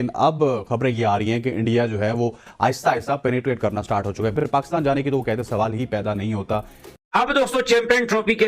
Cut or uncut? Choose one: cut